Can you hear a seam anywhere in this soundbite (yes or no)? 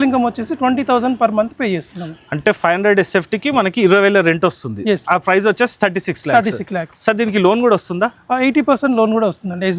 no